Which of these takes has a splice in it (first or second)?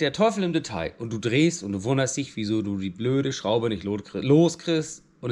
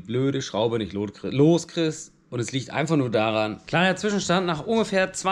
second